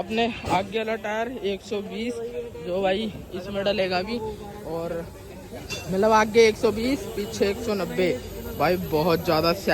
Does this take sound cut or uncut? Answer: uncut